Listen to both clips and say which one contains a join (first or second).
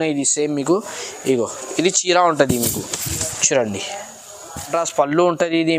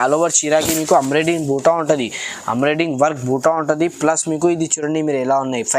first